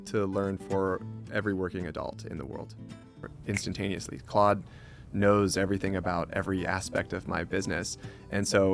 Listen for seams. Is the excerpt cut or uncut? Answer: cut